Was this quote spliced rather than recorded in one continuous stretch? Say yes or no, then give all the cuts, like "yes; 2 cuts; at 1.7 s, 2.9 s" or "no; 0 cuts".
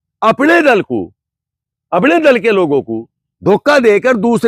no; 0 cuts